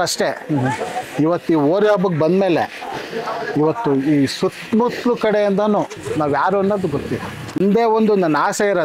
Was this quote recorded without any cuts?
no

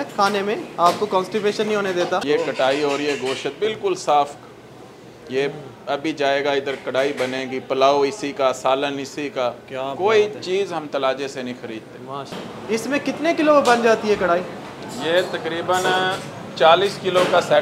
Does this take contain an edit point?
yes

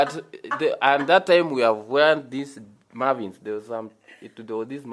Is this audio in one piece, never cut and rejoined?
yes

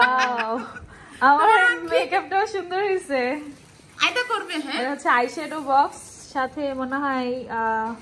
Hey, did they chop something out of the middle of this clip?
no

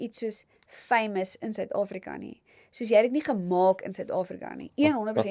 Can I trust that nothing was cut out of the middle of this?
yes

